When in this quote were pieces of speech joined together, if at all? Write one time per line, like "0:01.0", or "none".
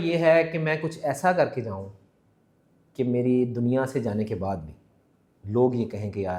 none